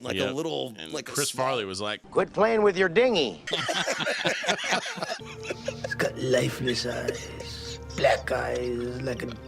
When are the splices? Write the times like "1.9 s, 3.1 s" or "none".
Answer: 3.4 s, 5.2 s